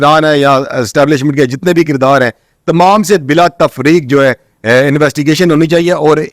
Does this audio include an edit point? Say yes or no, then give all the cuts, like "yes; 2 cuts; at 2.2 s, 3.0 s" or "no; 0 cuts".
no; 0 cuts